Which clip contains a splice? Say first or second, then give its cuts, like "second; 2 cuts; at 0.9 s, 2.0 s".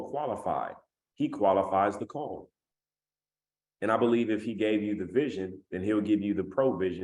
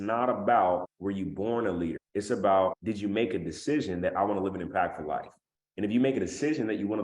second; 3 cuts; at 0.9 s, 2.0 s, 2.8 s